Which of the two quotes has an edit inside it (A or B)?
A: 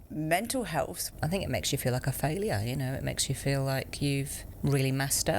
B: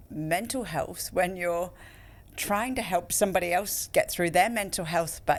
A